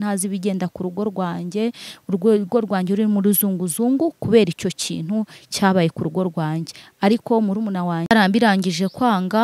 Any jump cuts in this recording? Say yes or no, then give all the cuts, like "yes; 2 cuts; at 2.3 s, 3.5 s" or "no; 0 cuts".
yes; 1 cut; at 8.1 s